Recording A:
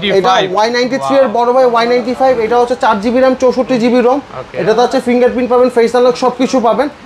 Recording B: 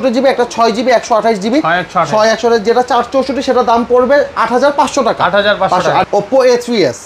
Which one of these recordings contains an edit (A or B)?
B